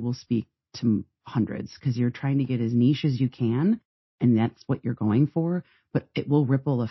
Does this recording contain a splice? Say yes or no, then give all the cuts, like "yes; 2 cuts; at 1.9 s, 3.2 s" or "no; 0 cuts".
no; 0 cuts